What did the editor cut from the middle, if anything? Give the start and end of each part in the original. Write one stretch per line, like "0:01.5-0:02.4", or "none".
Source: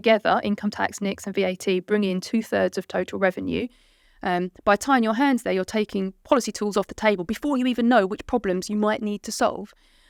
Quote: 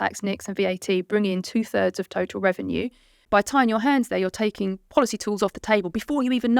0:04.0-0:04.5